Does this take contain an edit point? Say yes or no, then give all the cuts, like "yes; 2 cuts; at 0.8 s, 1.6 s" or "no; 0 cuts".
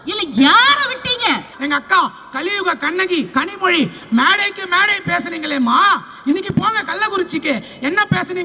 yes; 1 cut; at 1.5 s